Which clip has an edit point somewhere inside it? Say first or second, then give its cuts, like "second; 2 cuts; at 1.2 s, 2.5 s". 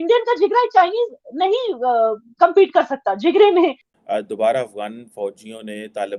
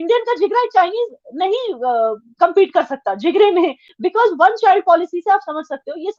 first; 1 cut; at 3.9 s